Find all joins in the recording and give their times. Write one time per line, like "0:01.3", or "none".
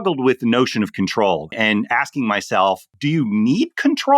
0:01.5
0:02.9